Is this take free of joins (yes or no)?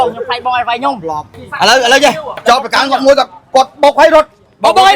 no